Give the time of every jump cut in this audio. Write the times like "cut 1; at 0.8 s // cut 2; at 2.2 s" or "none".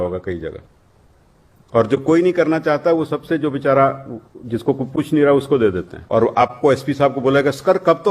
cut 1; at 5.9 s